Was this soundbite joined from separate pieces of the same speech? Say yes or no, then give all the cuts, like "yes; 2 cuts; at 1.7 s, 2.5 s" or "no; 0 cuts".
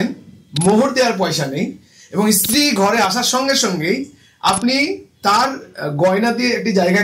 no; 0 cuts